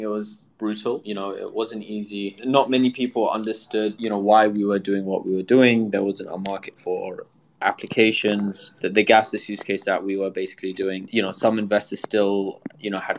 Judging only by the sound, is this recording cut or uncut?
cut